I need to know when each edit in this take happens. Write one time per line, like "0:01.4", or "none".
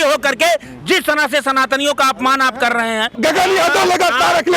0:03.2